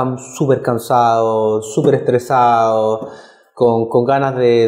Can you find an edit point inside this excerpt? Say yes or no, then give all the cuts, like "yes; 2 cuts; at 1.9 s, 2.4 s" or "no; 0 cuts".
no; 0 cuts